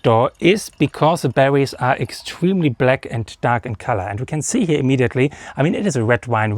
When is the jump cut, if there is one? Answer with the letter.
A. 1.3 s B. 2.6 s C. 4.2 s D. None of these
D